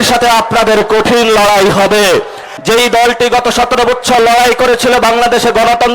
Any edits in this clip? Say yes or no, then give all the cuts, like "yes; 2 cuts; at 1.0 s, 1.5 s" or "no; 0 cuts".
yes; 1 cut; at 2.5 s